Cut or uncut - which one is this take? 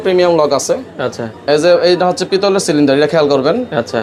uncut